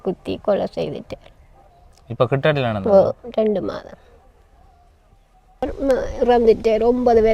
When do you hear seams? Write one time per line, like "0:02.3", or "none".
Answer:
0:05.6